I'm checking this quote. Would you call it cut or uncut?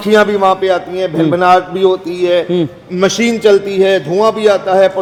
uncut